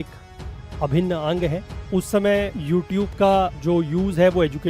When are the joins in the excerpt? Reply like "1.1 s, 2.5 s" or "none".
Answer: 1.7 s, 2.6 s, 3.6 s